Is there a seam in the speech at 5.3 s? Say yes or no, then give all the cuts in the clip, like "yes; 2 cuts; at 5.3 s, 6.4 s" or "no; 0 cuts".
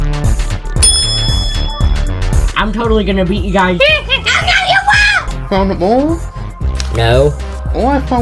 yes; 1 cut; at 5.3 s